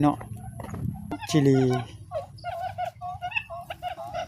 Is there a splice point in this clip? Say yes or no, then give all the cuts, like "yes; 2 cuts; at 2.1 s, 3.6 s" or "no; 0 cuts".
yes; 1 cut; at 1.2 s